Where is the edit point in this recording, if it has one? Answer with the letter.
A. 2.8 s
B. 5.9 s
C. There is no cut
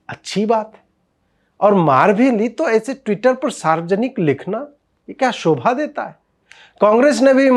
C